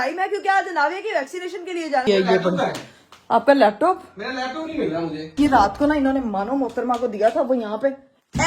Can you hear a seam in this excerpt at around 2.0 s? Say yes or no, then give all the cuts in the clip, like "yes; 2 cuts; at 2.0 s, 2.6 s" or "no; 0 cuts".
yes; 2 cuts; at 2.0 s, 5.2 s